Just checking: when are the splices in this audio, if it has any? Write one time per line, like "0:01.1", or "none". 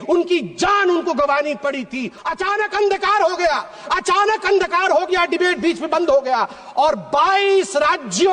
0:02.1